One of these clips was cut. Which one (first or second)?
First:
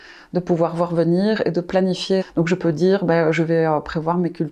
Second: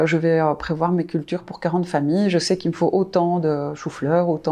first